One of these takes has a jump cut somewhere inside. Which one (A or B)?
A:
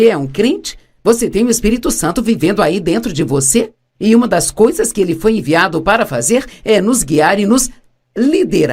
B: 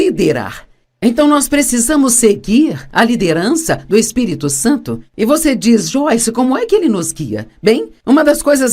A